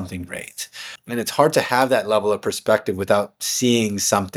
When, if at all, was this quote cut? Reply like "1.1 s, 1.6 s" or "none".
0.9 s